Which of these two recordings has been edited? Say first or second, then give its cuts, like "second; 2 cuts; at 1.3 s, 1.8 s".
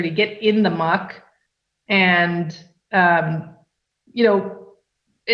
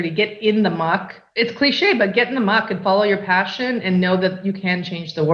second; 1 cut; at 1.2 s